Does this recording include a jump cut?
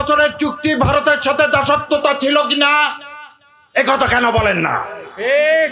no; 0 cuts

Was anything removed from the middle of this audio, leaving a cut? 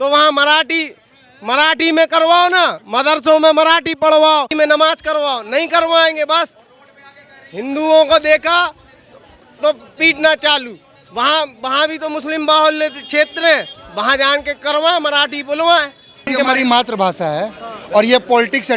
yes; 2 cuts; at 4.5 s, 16.2 s

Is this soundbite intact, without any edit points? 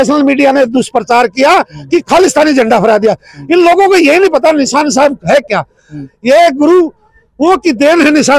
yes; 0 cuts

